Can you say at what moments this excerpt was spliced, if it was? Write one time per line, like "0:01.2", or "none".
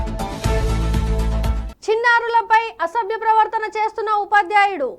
0:01.6